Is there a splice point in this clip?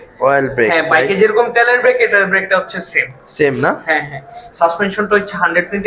no; 0 cuts

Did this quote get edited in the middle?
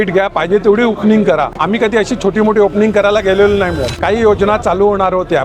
yes; 2 cuts; at 1.5 s, 4.0 s

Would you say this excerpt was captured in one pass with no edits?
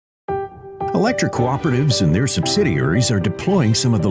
no; 1 cut; at 0.9 s

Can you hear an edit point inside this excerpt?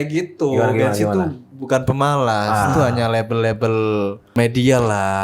yes; 1 cut; at 4.3 s

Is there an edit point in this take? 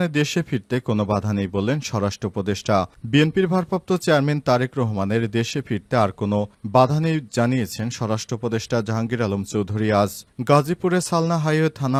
no; 0 cuts

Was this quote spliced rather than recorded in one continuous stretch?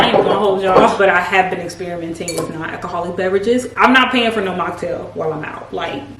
no; 0 cuts

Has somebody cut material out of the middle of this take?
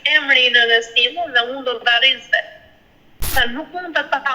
yes; 1 cut; at 3.3 s

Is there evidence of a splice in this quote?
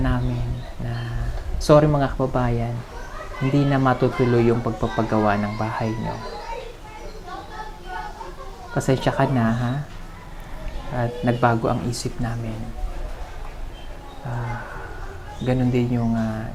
no; 0 cuts

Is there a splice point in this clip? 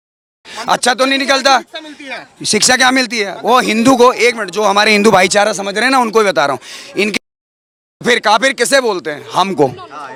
no; 0 cuts

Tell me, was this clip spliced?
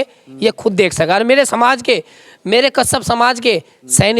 no; 0 cuts

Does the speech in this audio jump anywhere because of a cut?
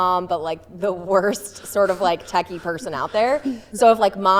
no; 0 cuts

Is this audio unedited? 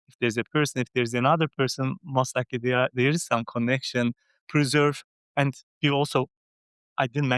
yes; 0 cuts

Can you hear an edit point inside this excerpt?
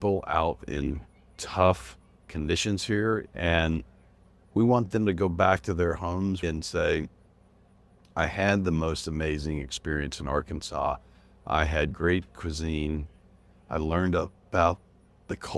yes; 3 cuts; at 3.3 s, 6.4 s, 13.5 s

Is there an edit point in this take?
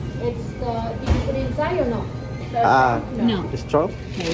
no; 0 cuts

